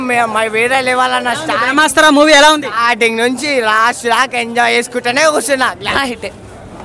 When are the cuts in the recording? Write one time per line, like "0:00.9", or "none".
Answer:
0:05.8